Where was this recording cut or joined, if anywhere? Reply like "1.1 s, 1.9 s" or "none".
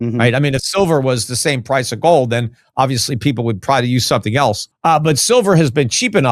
4.7 s